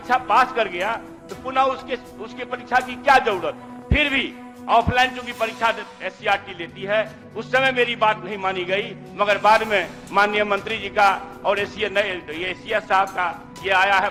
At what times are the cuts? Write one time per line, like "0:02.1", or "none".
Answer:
none

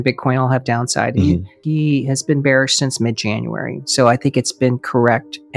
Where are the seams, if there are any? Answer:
0:01.6

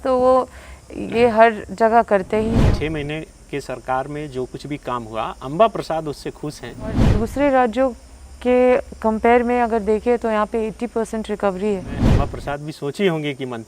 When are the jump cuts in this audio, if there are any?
0:02.6
0:07.1
0:12.0

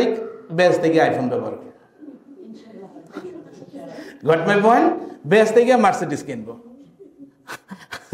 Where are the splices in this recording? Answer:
none

